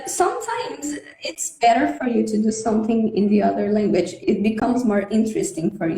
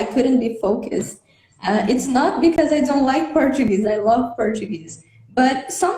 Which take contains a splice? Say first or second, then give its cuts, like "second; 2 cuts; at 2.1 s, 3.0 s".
first; 1 cut; at 4.2 s